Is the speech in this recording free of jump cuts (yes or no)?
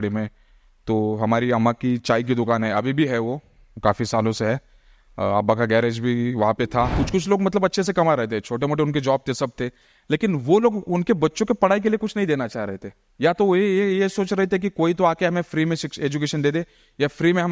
no